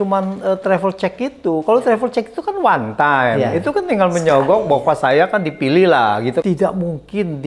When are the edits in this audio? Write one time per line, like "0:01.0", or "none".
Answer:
0:06.4